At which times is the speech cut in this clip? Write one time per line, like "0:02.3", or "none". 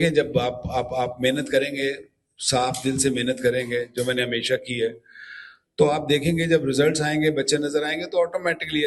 none

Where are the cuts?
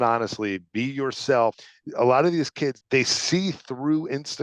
0:01.5
0:02.8

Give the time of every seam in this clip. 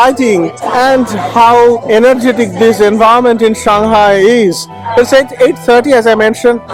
none

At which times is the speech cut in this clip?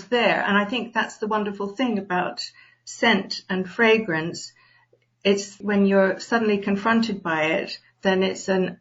0:05.5

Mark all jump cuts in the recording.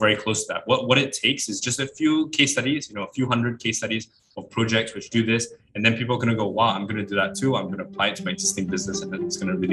none

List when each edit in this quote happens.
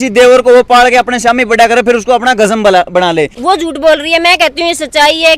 0:03.4

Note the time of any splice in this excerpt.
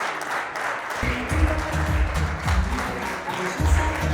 0:01.0

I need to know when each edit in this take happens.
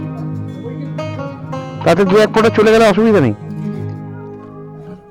0:01.8
0:04.1

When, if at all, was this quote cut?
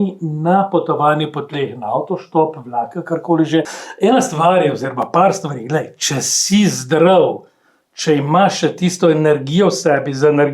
0:03.8

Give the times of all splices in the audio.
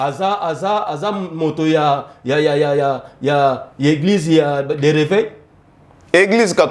none

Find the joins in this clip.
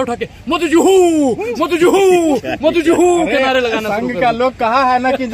none

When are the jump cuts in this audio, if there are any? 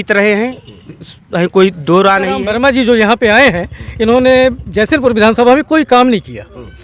0:02.5

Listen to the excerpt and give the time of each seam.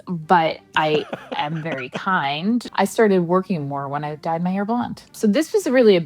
0:02.7
0:05.1

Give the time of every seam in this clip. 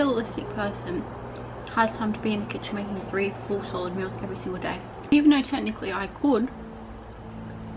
0:05.1

